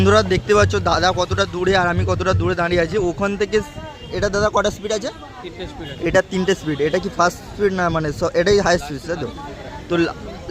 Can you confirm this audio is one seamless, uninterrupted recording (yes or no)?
yes